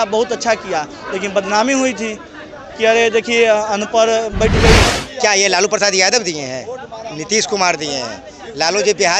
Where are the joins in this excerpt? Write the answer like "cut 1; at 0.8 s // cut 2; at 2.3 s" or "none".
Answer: cut 1; at 4.8 s